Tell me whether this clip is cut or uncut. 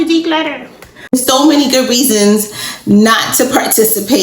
cut